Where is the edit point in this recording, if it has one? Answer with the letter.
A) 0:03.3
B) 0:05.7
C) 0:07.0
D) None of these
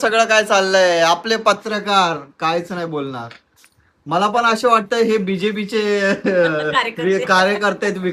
D